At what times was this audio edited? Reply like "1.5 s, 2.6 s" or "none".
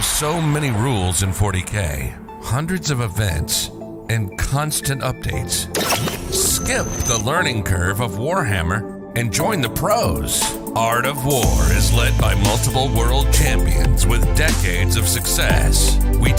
none